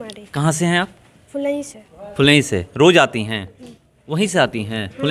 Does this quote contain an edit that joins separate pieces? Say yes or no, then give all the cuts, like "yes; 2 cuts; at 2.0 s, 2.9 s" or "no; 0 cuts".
no; 0 cuts